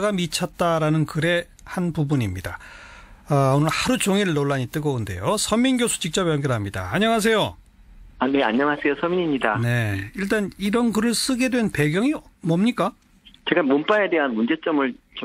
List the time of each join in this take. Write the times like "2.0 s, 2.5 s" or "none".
none